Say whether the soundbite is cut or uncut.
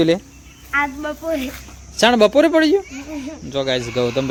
uncut